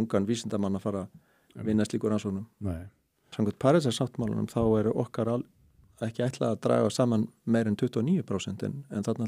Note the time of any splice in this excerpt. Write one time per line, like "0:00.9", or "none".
0:03.3